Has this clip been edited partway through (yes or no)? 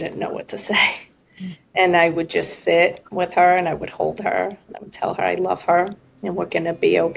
no